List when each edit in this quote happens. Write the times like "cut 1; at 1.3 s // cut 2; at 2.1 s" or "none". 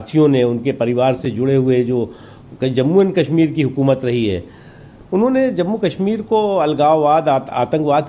none